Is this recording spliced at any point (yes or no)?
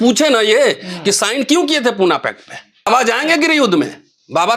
yes